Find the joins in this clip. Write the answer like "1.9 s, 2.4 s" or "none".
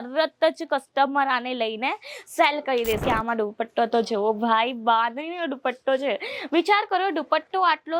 3.0 s